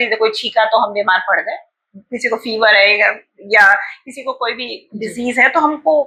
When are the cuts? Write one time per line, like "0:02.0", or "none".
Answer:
none

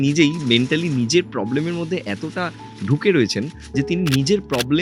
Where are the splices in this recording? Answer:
none

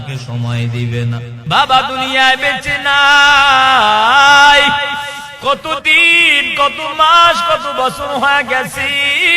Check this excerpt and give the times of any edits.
0:01.3

